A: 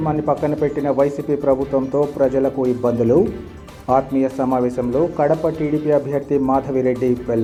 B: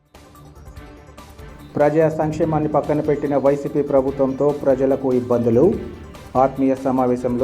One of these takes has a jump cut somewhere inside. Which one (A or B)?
B